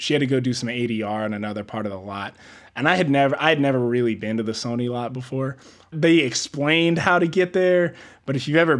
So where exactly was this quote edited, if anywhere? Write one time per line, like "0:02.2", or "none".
none